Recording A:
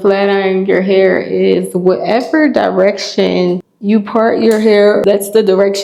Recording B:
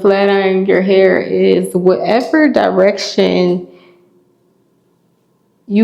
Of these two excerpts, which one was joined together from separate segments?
A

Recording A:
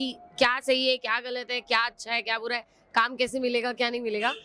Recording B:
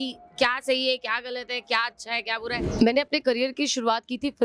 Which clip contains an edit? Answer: B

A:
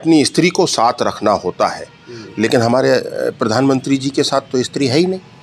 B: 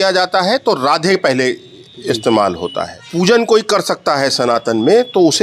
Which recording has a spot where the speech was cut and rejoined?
B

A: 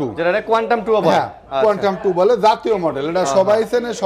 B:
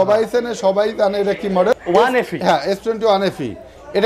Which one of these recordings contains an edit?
B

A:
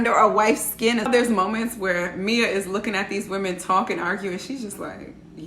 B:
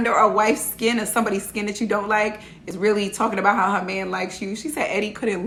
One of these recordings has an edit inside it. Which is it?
A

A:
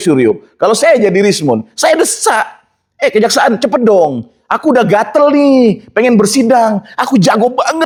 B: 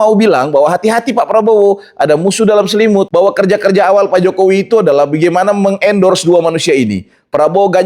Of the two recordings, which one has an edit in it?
B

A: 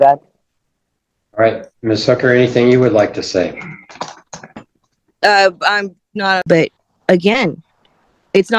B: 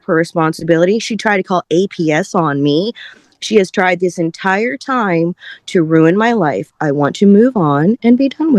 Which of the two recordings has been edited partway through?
A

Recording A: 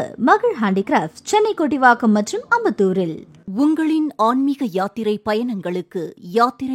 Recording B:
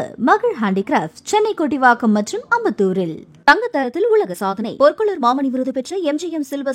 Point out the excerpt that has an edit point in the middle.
A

